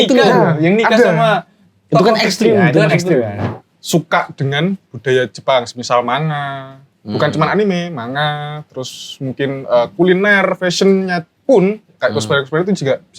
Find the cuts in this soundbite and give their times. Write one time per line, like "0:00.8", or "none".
0:03.4